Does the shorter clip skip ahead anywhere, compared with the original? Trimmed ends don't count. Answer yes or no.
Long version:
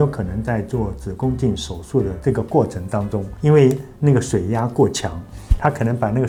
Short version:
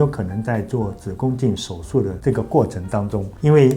no